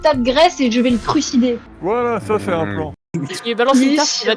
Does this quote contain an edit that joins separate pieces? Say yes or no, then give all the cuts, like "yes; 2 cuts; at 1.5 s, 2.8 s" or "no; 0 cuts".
yes; 2 cuts; at 1.7 s, 3.1 s